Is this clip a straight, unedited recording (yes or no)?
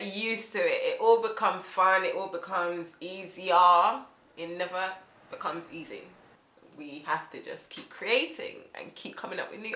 yes